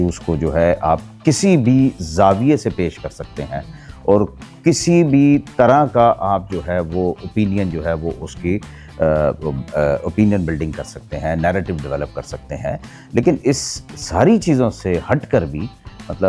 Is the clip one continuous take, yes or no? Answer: yes